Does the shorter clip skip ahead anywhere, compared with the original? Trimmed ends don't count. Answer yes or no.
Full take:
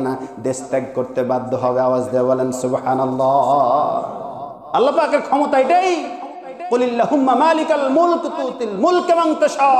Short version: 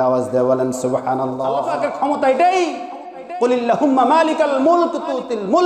yes